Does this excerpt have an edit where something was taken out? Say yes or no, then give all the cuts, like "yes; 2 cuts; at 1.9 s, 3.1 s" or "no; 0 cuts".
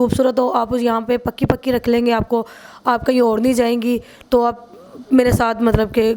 no; 0 cuts